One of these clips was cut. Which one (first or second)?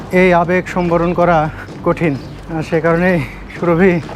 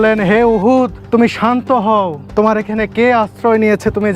second